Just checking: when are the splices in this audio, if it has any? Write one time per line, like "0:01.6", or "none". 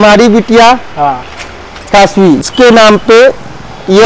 0:02.5